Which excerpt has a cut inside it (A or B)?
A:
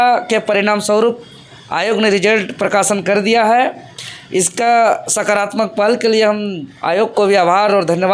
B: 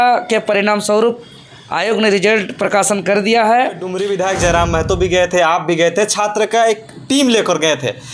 B